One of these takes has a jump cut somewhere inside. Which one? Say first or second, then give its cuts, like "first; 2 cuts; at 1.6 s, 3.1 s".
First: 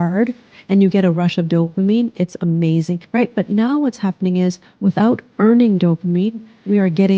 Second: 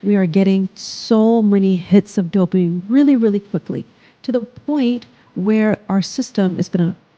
first; 1 cut; at 3.0 s